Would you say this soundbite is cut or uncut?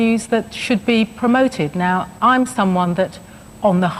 uncut